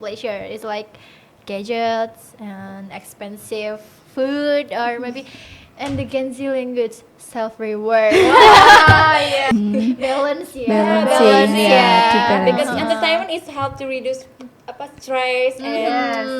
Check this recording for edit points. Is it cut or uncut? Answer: cut